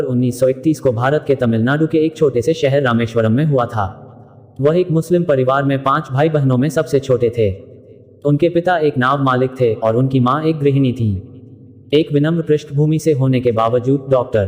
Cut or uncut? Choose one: uncut